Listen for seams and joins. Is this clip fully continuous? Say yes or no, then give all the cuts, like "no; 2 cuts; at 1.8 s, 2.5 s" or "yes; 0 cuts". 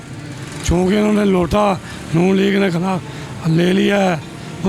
yes; 0 cuts